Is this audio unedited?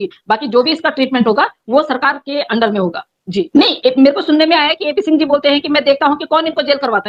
yes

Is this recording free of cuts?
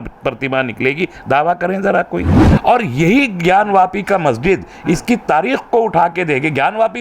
no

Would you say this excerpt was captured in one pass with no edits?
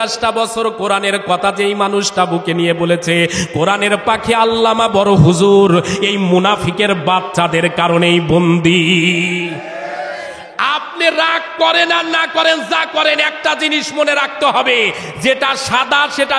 yes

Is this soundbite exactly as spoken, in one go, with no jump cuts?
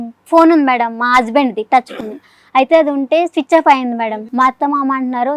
no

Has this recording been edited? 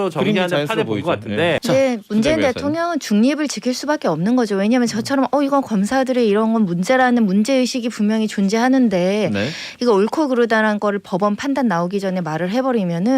yes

